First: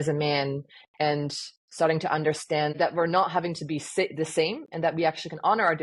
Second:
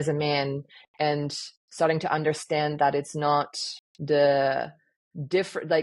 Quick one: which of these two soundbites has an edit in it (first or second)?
first